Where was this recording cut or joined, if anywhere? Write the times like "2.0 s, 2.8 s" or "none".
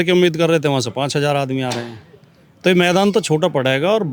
none